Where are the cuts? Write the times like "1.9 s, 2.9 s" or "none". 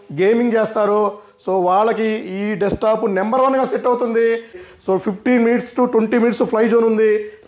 4.6 s

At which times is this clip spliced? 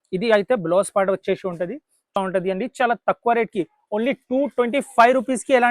2.2 s

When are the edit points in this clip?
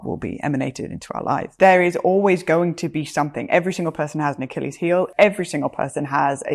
1.5 s, 5.1 s

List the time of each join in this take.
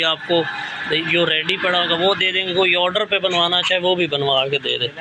none

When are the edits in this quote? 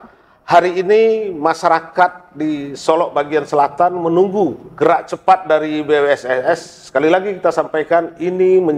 4.6 s

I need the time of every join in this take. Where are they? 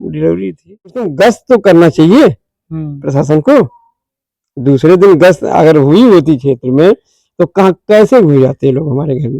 1.1 s

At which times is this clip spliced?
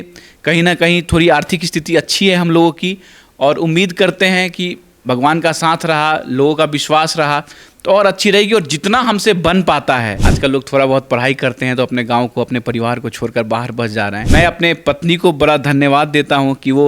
10.2 s, 14.2 s

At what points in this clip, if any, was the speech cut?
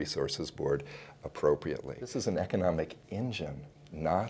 2.0 s

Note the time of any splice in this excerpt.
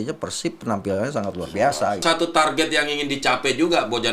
2.0 s

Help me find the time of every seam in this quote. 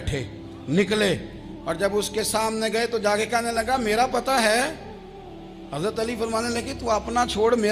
none

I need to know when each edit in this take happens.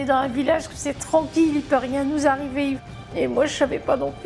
2.9 s

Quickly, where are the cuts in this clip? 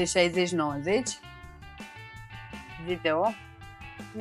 none

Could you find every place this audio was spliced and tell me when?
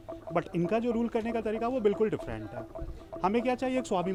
none

